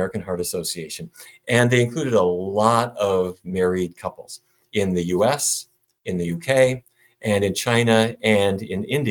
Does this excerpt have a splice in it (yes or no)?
no